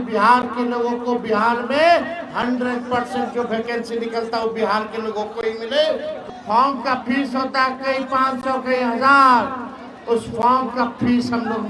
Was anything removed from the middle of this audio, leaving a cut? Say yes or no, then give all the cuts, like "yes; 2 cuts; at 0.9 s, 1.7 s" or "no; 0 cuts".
yes; 1 cut; at 6.2 s